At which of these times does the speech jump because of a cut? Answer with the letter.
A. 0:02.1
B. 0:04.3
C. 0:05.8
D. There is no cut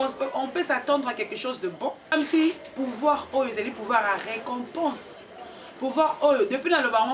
A